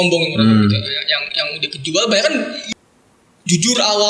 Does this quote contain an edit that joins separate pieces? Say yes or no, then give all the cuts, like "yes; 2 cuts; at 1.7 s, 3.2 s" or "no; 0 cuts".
yes; 1 cut; at 2.6 s